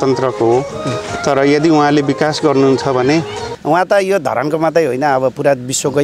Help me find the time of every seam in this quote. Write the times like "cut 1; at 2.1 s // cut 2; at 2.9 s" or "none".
cut 1; at 3.5 s